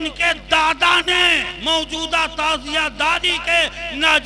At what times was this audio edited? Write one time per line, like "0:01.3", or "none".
0:01.5